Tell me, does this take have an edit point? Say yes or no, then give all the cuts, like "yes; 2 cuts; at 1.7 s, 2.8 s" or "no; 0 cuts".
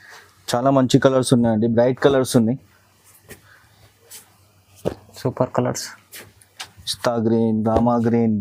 no; 0 cuts